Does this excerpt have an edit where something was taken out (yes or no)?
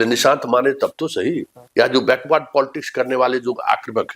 yes